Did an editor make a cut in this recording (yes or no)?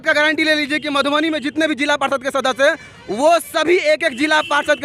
no